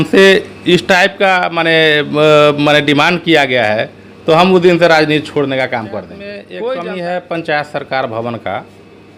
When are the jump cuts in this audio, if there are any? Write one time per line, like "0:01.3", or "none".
0:06.5